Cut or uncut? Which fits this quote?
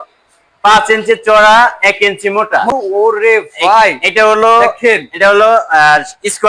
cut